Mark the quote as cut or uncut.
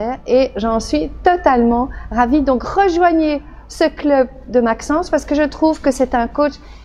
uncut